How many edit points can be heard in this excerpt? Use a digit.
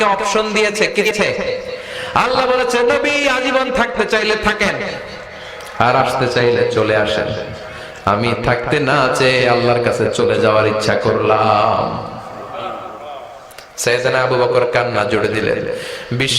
1